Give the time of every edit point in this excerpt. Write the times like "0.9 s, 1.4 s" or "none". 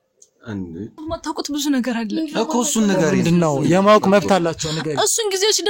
1.0 s